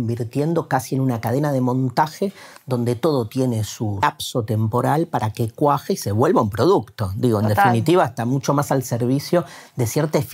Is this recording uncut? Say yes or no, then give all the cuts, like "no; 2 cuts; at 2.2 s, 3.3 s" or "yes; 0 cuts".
no; 1 cut; at 4.0 s